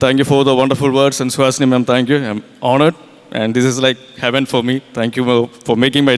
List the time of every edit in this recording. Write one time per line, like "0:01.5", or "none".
none